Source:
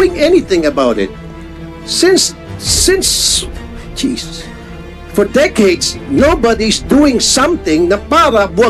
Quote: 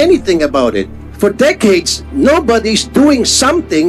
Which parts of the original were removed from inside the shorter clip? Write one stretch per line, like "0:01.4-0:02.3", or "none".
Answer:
0:01.2-0:05.0